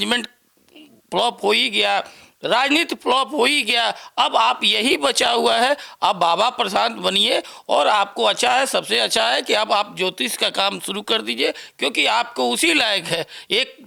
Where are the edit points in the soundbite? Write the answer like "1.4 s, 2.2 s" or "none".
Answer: none